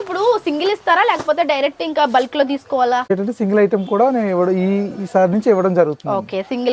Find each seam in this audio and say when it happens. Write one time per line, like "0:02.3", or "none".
0:03.1